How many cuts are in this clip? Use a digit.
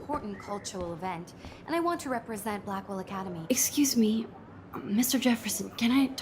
1